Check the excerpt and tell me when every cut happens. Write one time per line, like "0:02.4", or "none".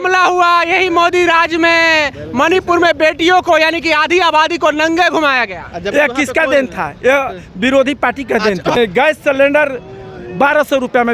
0:08.7